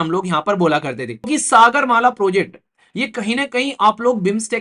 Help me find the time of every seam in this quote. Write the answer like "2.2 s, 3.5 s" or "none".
1.3 s